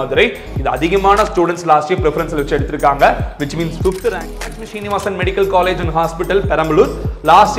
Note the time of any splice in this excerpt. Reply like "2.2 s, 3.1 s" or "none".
4.6 s